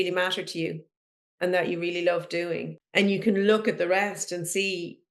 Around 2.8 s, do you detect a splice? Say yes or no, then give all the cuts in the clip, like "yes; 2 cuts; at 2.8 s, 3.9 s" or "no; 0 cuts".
yes; 1 cut; at 2.8 s